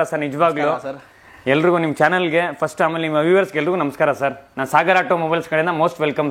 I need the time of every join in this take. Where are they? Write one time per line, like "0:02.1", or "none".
none